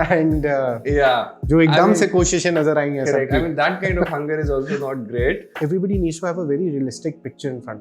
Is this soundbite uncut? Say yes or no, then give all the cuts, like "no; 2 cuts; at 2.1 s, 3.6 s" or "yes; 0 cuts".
no; 1 cut; at 5.5 s